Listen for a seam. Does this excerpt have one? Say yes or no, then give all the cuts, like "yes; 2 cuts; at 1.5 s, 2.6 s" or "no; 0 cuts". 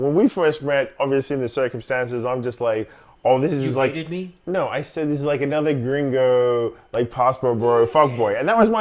no; 0 cuts